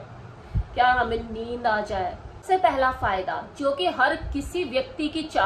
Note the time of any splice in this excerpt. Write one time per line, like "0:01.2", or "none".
0:02.3